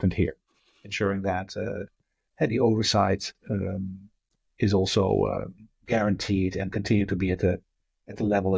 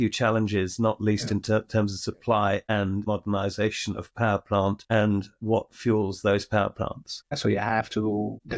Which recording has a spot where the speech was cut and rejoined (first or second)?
second